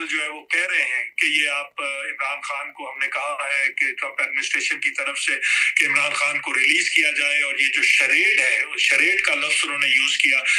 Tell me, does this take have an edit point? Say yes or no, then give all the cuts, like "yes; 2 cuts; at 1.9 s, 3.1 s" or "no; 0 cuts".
no; 0 cuts